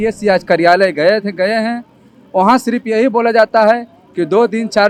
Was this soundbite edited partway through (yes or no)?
no